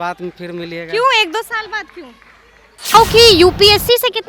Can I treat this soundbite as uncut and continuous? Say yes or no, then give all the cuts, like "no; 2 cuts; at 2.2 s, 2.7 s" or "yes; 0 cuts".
no; 1 cut; at 2.9 s